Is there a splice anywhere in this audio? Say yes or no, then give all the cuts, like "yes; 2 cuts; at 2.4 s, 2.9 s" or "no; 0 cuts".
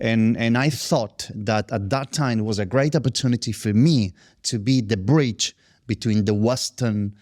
no; 0 cuts